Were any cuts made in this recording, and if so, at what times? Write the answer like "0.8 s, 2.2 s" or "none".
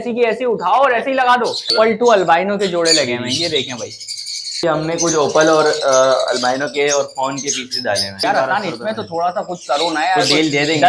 1.7 s, 4.6 s, 8.1 s